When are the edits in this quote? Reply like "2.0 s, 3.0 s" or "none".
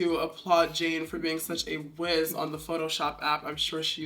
none